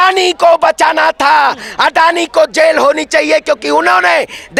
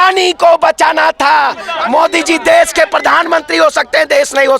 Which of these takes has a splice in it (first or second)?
second